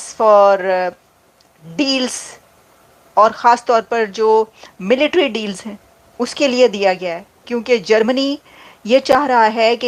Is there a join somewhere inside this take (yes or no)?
no